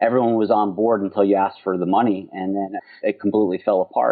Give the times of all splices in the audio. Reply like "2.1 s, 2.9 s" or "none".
2.8 s